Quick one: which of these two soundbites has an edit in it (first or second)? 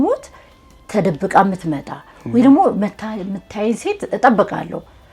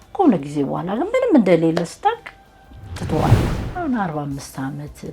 second